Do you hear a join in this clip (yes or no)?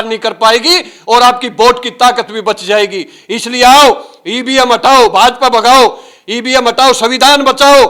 no